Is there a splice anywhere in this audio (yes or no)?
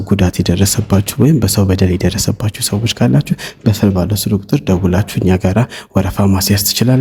no